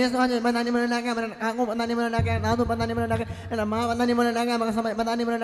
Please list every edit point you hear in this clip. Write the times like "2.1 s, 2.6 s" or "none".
none